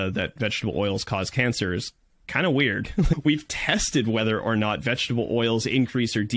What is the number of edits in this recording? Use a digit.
1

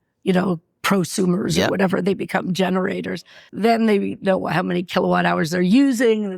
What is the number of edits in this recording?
1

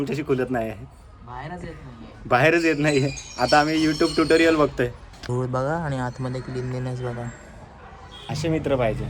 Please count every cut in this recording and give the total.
1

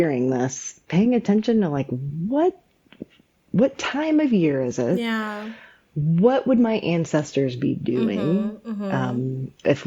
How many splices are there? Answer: 0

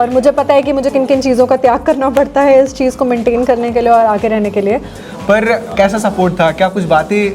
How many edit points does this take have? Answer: 1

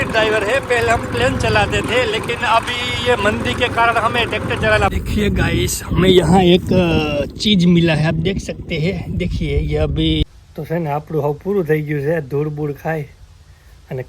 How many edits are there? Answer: 2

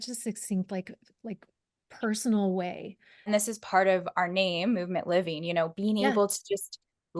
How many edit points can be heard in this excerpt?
1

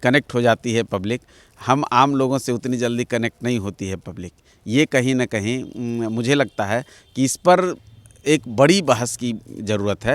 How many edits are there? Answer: 0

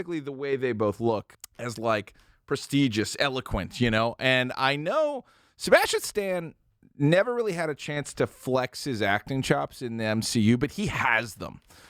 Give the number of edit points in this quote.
1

